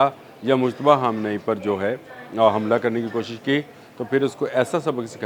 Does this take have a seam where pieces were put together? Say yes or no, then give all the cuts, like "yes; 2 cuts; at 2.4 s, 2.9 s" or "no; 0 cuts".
no; 0 cuts